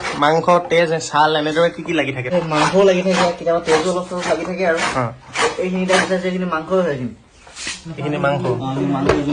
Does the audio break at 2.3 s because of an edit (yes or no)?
yes